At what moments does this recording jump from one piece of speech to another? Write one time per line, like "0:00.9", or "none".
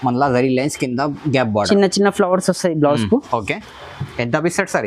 none